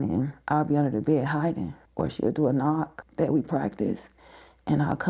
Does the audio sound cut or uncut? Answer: cut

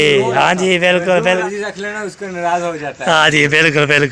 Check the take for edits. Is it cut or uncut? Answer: cut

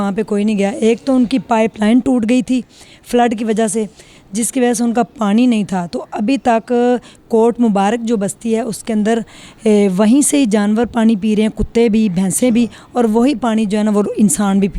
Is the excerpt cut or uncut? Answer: uncut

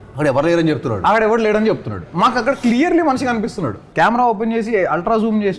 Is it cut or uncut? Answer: cut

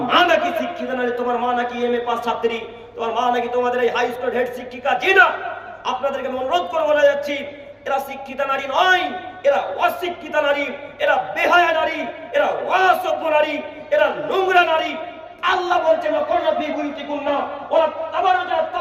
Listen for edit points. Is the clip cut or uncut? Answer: uncut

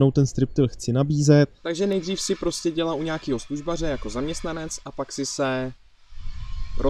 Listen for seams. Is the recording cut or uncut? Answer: cut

